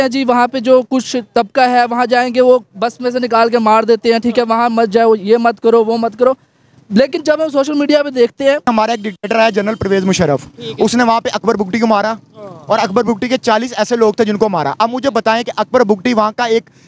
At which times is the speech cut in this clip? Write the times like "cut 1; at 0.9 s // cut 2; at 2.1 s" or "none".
cut 1; at 8.6 s